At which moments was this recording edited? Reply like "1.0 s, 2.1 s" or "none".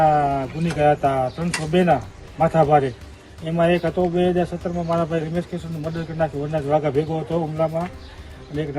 none

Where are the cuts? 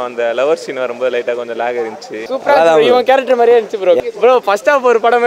2.2 s, 4.0 s

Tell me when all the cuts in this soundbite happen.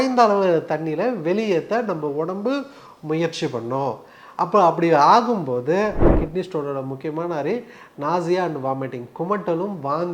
6.1 s

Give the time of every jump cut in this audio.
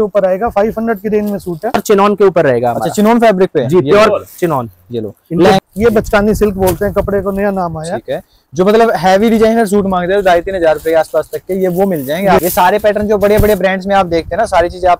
1.8 s, 5.6 s, 12.4 s

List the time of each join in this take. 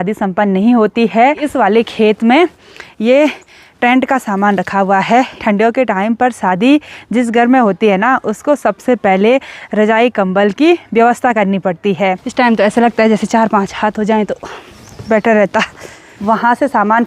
1.5 s, 5.4 s, 12.2 s, 16.1 s

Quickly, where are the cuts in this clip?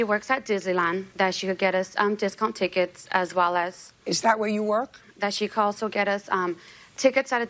5.0 s

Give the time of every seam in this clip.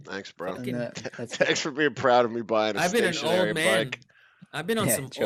none

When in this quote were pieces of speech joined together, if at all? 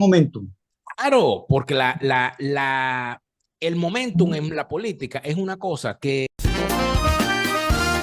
6.3 s

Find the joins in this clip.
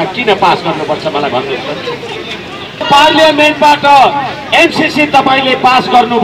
none

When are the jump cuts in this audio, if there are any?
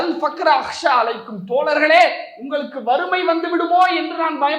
none

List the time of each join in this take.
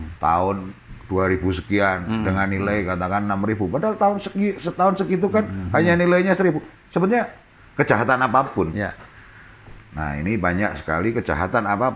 none

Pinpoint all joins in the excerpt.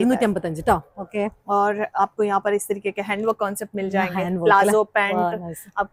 none

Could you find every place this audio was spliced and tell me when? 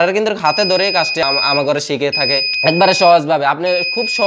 1.2 s, 2.5 s

